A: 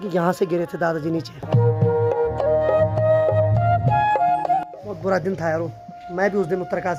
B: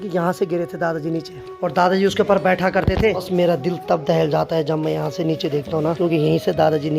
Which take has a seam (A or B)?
B